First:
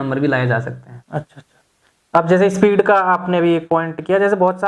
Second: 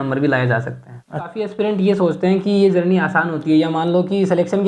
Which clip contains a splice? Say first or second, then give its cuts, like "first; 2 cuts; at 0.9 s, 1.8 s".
second; 1 cut; at 1.4 s